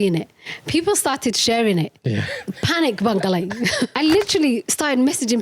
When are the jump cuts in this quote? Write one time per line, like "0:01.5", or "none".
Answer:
0:03.9